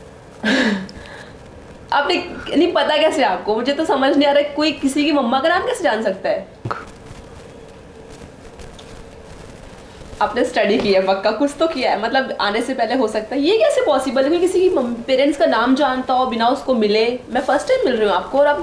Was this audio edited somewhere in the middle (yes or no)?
yes